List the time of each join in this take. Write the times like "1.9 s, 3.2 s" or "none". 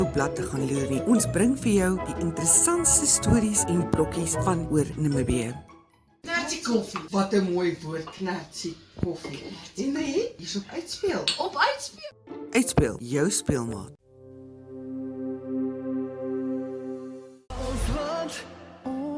17.2 s